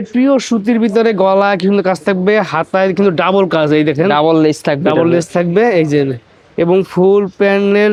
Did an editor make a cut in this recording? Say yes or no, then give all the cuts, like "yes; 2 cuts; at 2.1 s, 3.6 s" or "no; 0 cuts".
no; 0 cuts